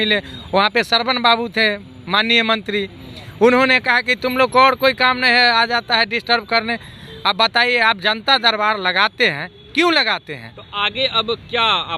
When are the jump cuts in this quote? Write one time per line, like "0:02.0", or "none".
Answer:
none